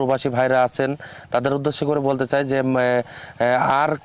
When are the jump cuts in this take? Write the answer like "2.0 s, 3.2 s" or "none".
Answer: none